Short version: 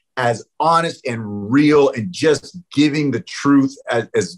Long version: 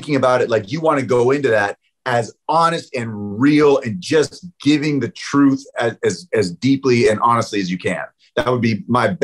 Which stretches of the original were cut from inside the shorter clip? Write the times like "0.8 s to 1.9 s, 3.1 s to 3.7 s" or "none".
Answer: none